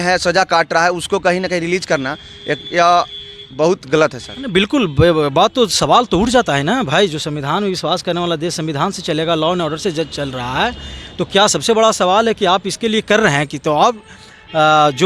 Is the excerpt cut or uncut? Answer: uncut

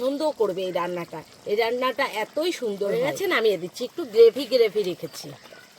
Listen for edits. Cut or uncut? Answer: cut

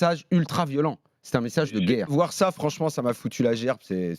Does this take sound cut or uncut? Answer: cut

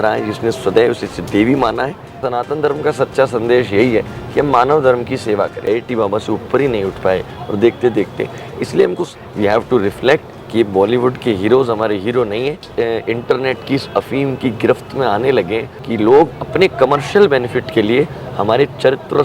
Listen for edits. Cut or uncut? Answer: cut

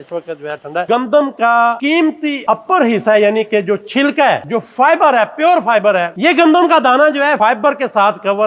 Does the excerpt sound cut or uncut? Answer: cut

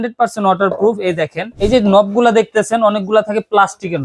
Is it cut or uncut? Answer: cut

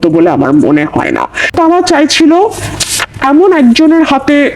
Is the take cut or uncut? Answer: cut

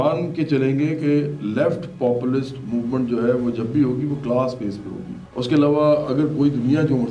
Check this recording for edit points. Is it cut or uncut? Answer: uncut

